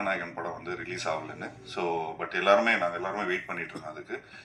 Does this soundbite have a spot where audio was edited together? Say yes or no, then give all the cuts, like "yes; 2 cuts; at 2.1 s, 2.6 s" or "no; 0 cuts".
no; 0 cuts